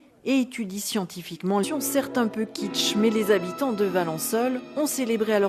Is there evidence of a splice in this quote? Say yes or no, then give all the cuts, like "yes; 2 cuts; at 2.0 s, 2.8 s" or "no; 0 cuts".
no; 0 cuts